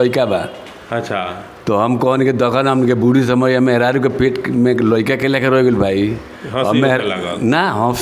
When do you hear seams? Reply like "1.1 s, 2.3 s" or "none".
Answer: none